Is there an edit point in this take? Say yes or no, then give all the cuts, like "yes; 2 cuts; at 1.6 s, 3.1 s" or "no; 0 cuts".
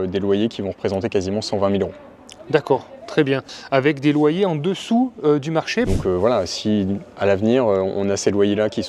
yes; 2 cuts; at 3.5 s, 5.9 s